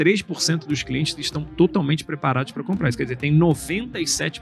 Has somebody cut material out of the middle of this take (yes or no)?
no